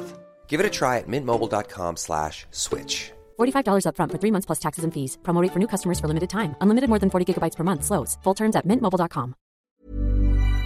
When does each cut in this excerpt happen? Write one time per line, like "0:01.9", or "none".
0:09.6